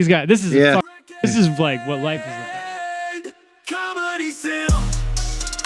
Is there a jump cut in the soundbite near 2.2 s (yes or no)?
yes